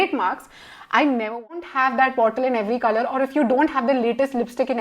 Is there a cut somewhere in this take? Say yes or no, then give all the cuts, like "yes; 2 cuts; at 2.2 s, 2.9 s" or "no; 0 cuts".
yes; 1 cut; at 1.7 s